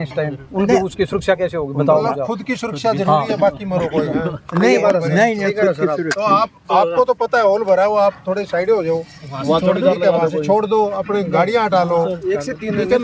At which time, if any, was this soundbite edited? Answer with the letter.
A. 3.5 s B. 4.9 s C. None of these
C